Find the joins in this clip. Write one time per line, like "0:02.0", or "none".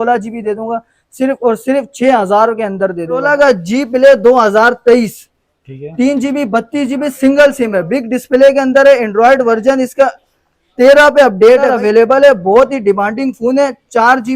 0:03.2
0:11.7